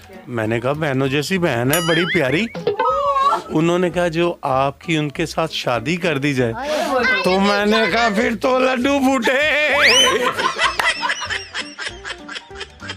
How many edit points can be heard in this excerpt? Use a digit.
1